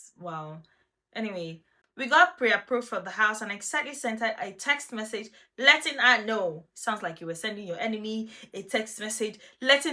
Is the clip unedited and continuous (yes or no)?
no